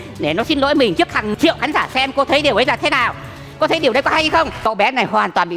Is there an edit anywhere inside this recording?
yes; 1 cut; at 4.5 s

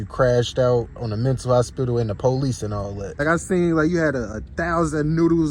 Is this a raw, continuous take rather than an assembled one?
no; 1 cut; at 3.2 s

